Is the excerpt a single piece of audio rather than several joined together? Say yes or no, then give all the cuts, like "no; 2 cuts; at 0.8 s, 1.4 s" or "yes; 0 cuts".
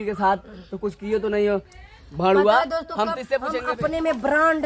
no; 1 cut; at 3.5 s